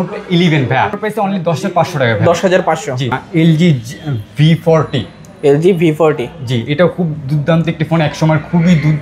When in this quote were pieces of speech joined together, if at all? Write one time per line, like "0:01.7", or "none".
0:01.0
0:03.1